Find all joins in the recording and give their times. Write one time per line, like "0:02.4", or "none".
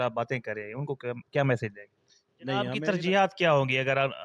0:02.7